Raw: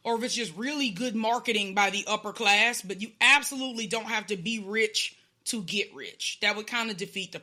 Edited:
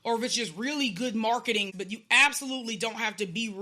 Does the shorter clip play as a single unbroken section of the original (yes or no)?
no